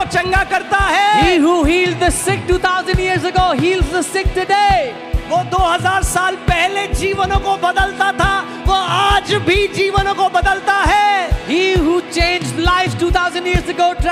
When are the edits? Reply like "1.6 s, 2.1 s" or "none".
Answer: none